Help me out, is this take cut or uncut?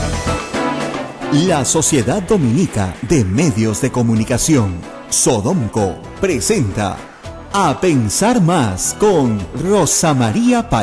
cut